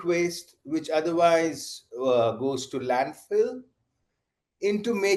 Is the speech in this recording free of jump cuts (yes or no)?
yes